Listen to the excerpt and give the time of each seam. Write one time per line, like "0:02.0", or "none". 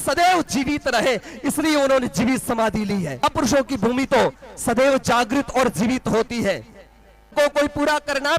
0:03.2
0:07.3